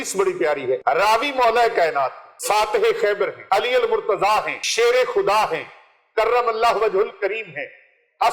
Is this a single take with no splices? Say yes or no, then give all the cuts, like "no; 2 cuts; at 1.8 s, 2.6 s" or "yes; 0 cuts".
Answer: no; 4 cuts; at 0.8 s, 2.3 s, 3.4 s, 4.6 s